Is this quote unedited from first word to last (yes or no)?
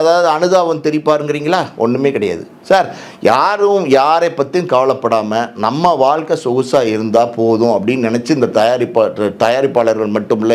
yes